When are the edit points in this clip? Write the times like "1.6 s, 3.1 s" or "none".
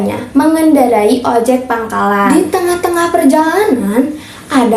2.3 s